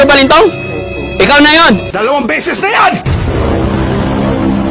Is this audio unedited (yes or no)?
yes